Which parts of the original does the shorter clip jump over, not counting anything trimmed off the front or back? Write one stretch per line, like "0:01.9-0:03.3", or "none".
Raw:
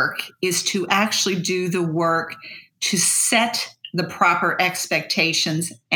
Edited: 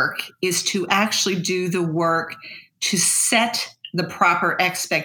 none